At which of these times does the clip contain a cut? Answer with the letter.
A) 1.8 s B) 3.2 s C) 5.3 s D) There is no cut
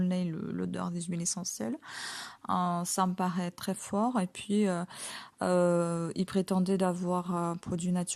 D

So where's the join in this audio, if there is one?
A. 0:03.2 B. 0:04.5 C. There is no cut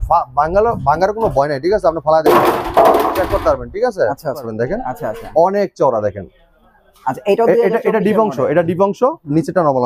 B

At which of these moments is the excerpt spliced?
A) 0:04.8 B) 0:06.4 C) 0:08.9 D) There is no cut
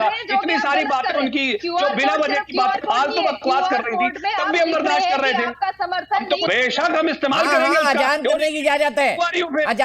B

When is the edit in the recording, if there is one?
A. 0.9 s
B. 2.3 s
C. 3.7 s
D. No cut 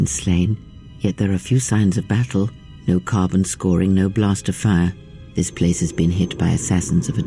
D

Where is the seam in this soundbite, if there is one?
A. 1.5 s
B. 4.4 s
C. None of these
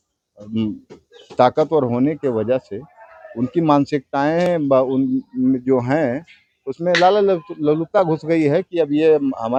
C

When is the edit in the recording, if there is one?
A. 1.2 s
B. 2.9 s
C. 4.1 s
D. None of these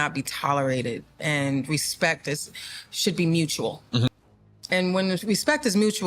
C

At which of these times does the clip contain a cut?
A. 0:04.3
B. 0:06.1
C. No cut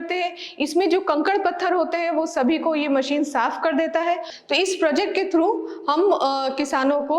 A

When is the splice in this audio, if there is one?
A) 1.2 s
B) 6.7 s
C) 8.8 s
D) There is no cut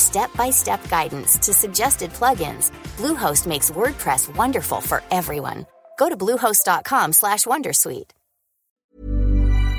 C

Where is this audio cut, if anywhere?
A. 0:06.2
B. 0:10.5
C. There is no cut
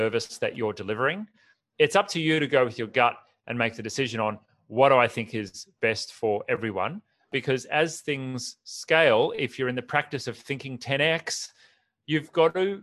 C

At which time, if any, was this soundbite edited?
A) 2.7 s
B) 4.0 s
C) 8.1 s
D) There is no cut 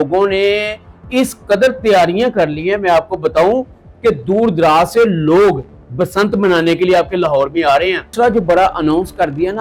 C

